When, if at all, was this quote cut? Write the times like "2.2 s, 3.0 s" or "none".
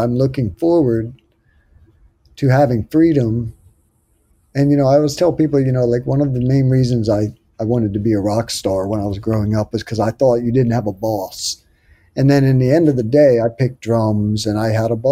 none

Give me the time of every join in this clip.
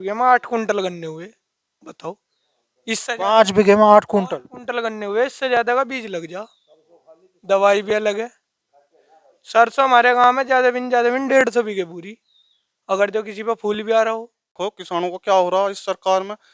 14.5 s

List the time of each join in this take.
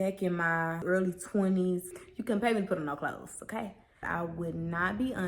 0.8 s, 2.1 s, 4.1 s

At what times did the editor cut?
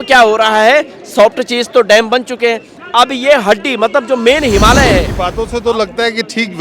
5.2 s

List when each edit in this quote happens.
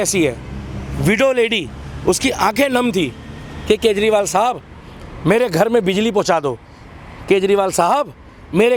none

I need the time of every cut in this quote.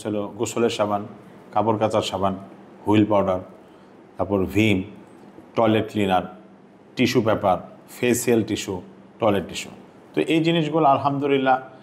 none

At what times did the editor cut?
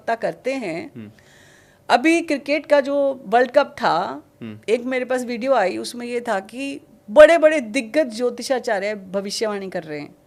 none

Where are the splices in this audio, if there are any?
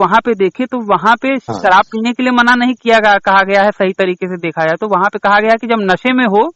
1.4 s

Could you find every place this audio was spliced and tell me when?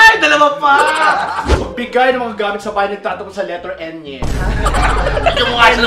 1.6 s

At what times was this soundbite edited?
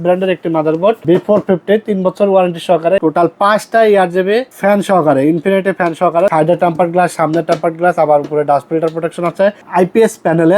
3.0 s, 4.5 s, 6.3 s, 9.6 s

